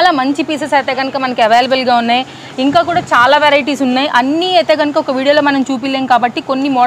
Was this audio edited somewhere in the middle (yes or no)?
no